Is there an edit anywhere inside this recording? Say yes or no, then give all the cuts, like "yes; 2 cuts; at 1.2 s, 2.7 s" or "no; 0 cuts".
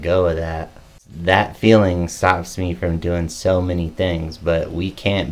yes; 1 cut; at 1.1 s